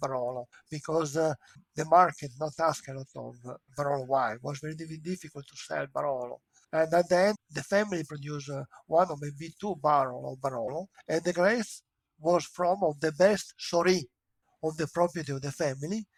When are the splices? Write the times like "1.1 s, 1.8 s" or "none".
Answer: none